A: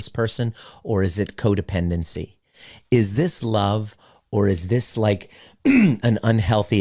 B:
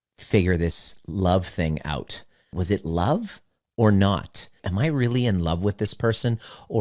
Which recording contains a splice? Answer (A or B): B